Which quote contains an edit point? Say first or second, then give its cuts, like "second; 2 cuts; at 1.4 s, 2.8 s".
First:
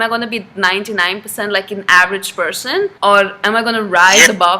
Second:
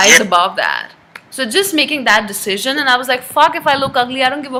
first; 1 cut; at 2.9 s